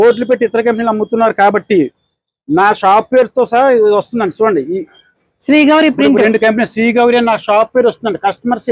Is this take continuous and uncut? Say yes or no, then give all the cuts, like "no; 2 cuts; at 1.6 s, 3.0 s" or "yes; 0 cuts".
yes; 0 cuts